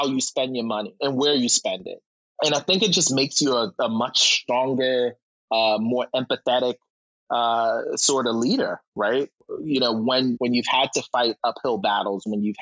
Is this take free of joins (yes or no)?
no